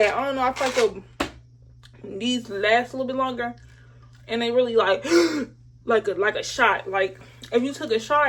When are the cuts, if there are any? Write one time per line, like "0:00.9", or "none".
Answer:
none